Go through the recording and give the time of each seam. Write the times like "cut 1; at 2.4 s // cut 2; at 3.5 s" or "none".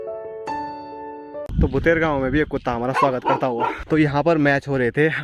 cut 1; at 1.5 s // cut 2; at 3.8 s

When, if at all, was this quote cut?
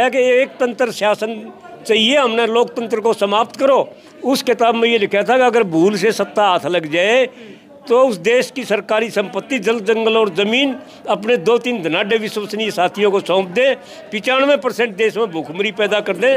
cut 1; at 4.1 s

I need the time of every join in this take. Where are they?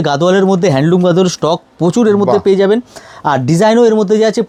none

